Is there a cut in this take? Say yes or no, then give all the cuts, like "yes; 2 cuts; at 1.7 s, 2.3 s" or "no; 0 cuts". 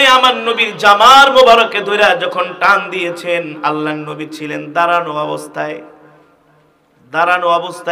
no; 0 cuts